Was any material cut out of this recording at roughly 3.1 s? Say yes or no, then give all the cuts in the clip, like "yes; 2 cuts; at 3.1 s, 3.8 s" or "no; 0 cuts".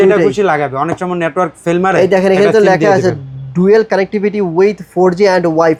no; 0 cuts